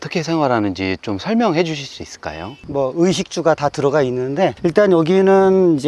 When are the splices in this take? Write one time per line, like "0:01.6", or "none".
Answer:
none

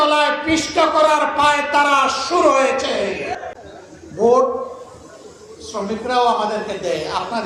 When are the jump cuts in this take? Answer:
0:03.5

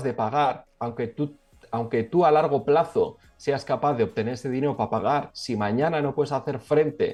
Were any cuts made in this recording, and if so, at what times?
none

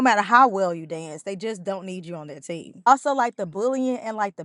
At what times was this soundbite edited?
0:02.9

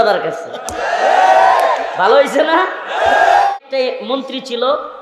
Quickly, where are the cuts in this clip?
0:03.5

